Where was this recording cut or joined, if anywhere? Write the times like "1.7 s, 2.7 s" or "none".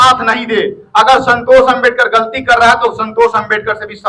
none